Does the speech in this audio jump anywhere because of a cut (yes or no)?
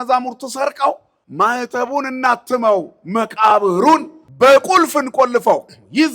yes